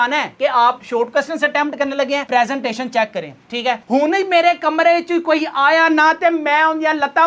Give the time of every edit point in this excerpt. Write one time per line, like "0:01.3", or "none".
0:03.8